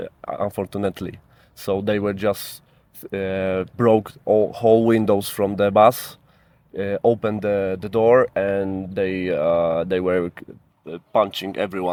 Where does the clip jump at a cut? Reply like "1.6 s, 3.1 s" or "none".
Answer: none

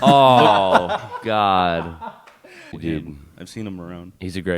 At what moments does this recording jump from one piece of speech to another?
2.7 s

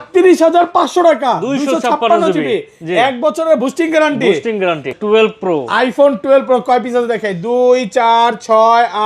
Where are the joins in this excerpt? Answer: 4.9 s

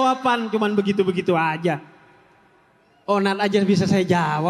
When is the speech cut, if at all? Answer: none

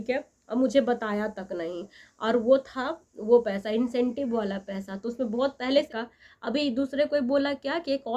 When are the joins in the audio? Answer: 5.9 s

